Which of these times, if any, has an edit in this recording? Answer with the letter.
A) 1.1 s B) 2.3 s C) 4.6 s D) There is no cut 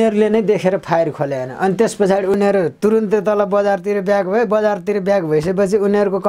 B